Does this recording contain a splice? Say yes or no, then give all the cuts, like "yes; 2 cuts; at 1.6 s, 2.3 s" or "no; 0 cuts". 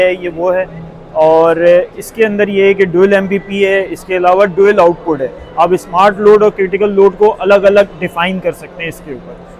no; 0 cuts